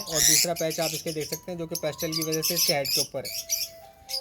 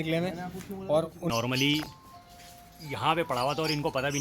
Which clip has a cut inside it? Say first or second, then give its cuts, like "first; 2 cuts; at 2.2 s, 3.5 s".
second; 1 cut; at 1.3 s